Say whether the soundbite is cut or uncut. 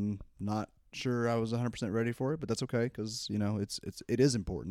uncut